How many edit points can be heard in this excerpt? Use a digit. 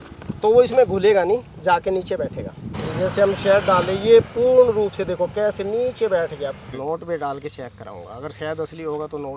2